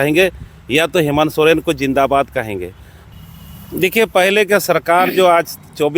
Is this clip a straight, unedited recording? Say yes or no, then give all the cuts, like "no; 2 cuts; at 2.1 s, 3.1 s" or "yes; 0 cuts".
no; 1 cut; at 3.1 s